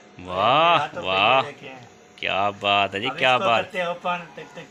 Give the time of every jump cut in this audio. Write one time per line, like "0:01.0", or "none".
none